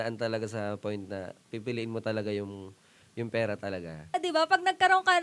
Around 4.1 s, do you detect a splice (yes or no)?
yes